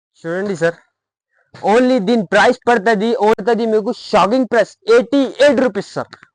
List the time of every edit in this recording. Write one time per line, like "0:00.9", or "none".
0:03.4